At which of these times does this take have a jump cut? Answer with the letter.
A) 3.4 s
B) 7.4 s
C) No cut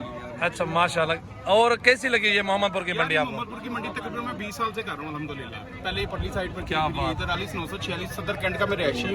B